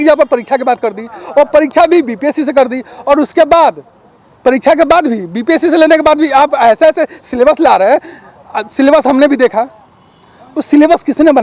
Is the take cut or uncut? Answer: uncut